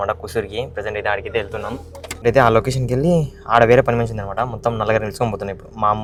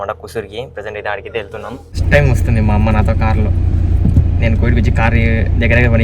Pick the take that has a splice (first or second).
second